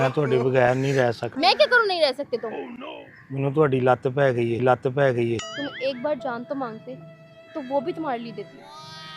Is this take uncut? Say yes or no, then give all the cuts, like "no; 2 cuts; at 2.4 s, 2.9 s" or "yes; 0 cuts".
no; 2 cuts; at 1.3 s, 5.5 s